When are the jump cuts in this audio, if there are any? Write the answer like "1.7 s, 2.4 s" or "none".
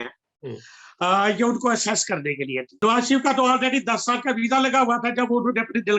2.7 s